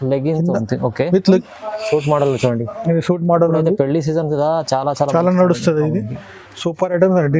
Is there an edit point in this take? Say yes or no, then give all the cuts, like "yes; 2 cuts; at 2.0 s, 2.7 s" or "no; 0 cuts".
yes; 1 cut; at 1.4 s